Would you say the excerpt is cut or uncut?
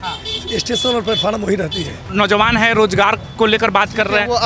cut